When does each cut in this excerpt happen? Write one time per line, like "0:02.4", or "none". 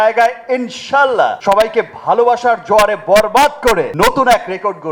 0:01.4
0:03.9